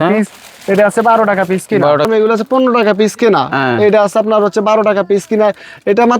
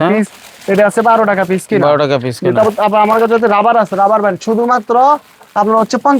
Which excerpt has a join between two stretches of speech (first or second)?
first